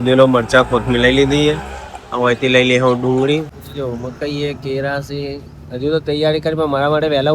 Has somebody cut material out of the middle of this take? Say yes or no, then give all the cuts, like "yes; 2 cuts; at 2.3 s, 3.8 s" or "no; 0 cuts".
yes; 1 cut; at 3.5 s